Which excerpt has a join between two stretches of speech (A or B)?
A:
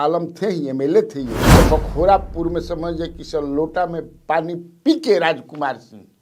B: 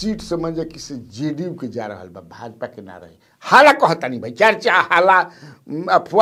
A